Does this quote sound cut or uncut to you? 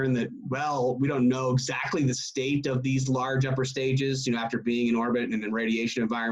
uncut